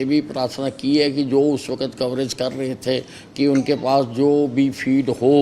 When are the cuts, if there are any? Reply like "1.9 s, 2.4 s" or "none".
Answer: none